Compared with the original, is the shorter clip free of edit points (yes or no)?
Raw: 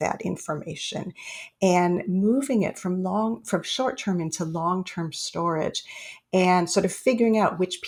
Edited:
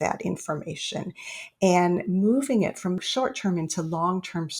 no